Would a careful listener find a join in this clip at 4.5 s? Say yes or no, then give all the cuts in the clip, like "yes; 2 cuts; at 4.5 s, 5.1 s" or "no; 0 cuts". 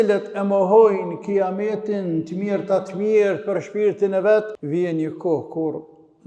yes; 1 cut; at 4.5 s